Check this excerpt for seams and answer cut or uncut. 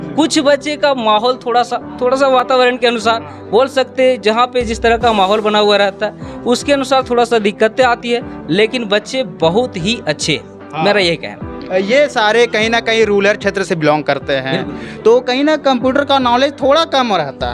uncut